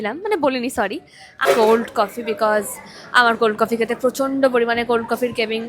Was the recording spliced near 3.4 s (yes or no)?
no